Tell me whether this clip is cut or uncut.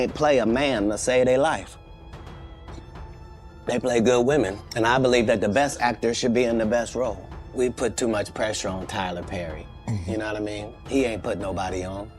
cut